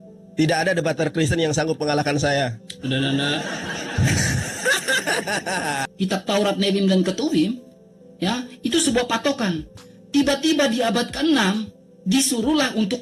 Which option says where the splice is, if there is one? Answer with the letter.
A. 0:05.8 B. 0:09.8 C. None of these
A